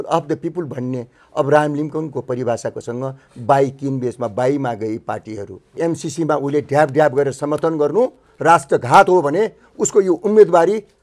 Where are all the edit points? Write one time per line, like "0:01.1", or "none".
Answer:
0:05.8